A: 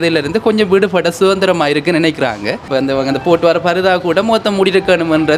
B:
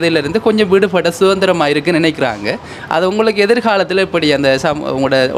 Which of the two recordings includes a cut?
A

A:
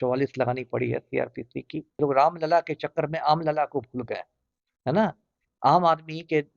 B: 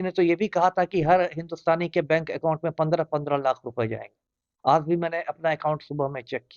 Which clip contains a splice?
A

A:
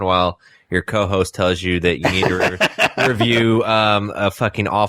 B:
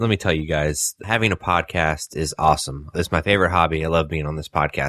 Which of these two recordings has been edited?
B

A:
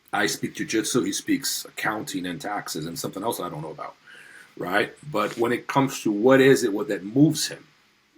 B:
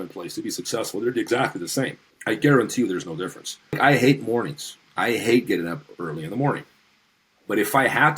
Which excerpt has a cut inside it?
B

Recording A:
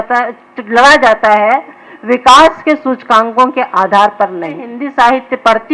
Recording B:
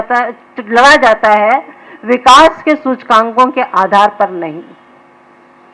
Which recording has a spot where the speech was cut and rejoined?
A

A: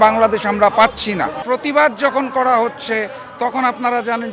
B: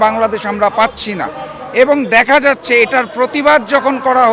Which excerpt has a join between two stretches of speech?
A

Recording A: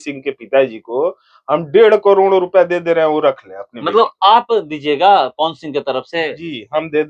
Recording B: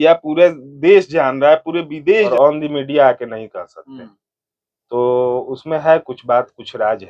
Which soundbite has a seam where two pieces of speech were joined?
B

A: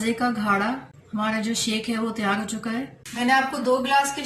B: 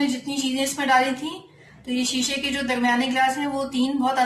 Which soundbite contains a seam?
A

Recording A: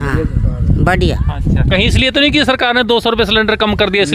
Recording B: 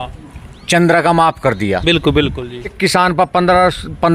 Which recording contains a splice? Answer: B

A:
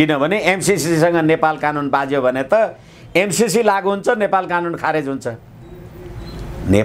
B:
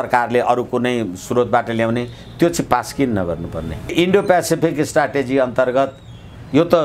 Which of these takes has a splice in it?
B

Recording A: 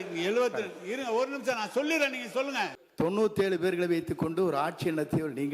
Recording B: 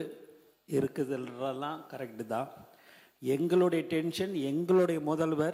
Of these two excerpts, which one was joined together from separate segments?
A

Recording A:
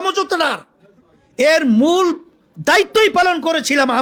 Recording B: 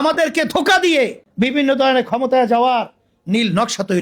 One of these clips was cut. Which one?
B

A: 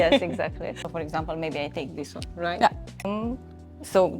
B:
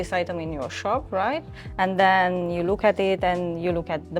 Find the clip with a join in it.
A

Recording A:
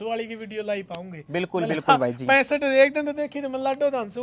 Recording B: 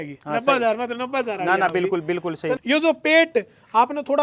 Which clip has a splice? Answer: B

